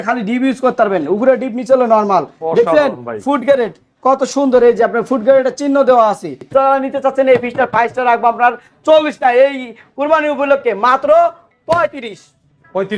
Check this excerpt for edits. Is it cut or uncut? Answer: cut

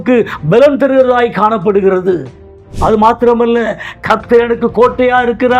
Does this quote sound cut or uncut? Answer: cut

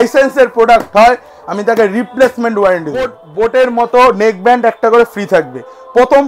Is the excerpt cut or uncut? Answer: cut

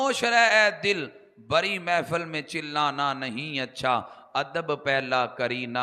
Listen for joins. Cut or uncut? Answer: uncut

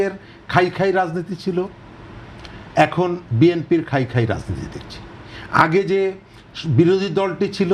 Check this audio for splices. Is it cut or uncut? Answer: uncut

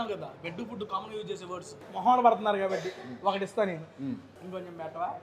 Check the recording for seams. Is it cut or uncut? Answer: cut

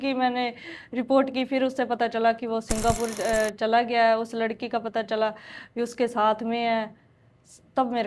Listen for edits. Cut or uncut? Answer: uncut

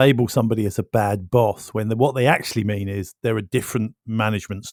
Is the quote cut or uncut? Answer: uncut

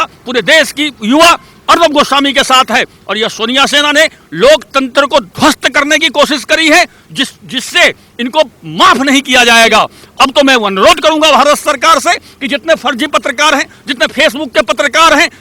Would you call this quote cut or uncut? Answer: uncut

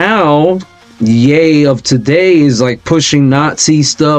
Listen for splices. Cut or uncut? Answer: uncut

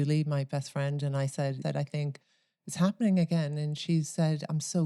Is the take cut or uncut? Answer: cut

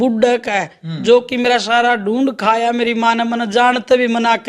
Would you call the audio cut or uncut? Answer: uncut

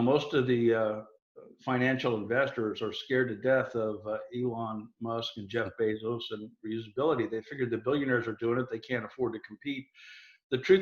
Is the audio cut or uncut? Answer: uncut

